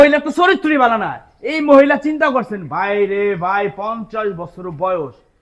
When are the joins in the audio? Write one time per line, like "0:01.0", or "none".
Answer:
none